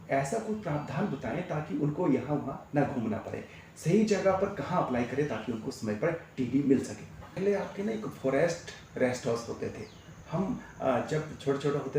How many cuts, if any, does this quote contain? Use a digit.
1